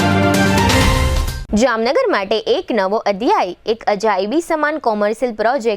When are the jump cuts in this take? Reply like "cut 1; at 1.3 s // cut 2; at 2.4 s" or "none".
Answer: cut 1; at 1.2 s